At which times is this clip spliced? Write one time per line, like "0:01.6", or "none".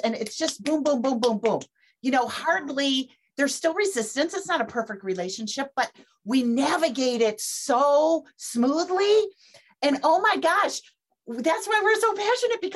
none